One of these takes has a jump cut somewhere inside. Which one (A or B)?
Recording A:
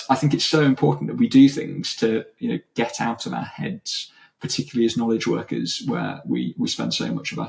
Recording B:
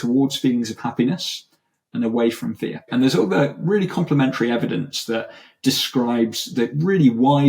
B